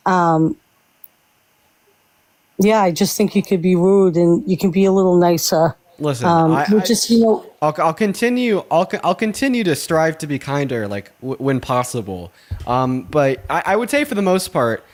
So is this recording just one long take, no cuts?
yes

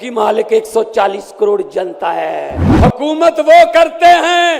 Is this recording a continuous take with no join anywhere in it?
no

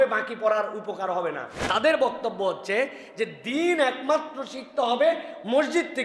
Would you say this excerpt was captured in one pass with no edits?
no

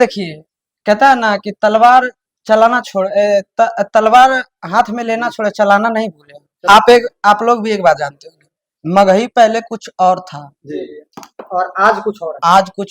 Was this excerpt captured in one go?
no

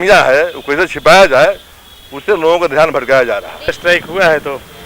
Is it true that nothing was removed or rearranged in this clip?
no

